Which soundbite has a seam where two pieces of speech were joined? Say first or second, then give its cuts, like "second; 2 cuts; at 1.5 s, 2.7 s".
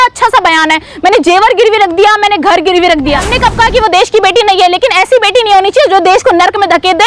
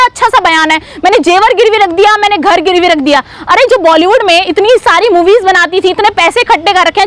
first; 1 cut; at 3.3 s